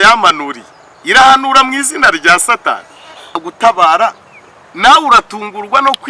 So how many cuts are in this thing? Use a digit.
1